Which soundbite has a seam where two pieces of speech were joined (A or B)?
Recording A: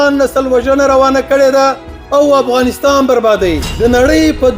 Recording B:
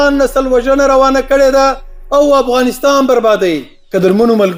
A